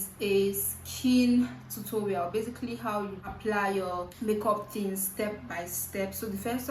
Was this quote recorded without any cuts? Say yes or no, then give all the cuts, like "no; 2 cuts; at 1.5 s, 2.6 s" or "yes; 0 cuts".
no; 2 cuts; at 3.2 s, 4.1 s